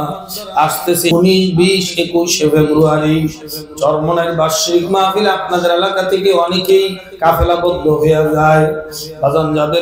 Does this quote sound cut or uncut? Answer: cut